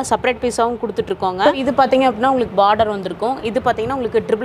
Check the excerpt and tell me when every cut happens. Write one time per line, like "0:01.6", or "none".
0:01.5

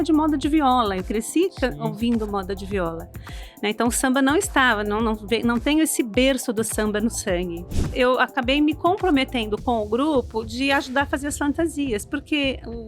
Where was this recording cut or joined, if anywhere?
0:07.9

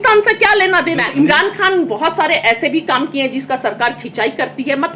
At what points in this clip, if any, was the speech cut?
0:01.1

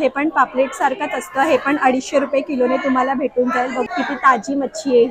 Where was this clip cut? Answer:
0:03.9

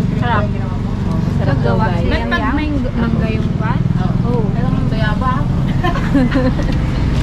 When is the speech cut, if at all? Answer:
none

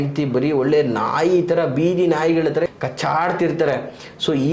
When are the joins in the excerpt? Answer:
0:02.7

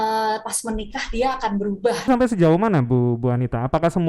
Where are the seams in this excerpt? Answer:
0:02.1

